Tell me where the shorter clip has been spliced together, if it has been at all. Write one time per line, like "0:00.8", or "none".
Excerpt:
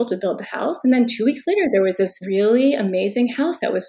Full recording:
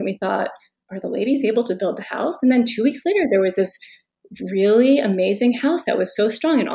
0:02.2